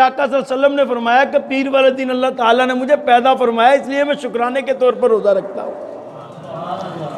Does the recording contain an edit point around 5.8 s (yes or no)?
no